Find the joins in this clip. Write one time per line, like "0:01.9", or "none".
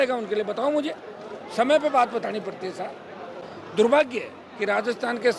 0:03.4